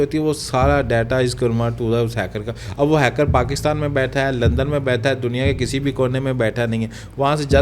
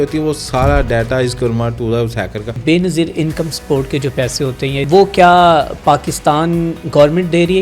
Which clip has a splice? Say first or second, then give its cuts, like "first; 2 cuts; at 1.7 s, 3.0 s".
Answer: second; 2 cuts; at 2.6 s, 4.8 s